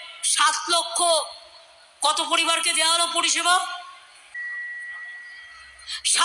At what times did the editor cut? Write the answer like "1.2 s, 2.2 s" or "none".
4.4 s